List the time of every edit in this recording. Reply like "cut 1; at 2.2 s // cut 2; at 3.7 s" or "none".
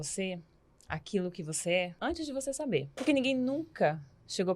cut 1; at 1.9 s // cut 2; at 3.0 s